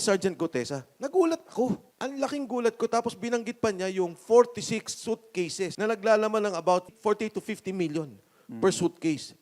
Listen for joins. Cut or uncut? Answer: cut